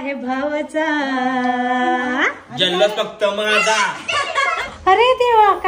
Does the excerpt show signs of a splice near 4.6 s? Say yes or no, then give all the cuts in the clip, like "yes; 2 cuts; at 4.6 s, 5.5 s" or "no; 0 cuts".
yes; 1 cut; at 4.6 s